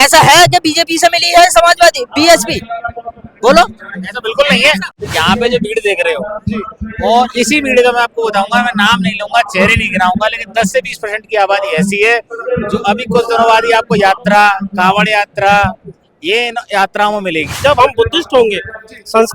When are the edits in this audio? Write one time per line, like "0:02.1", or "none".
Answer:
0:05.0
0:17.6